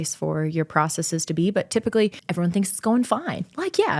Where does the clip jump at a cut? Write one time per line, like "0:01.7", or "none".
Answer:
0:02.2